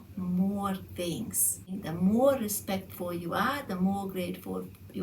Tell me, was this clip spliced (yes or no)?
yes